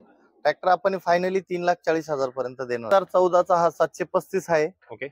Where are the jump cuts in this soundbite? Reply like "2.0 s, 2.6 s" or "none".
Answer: 2.9 s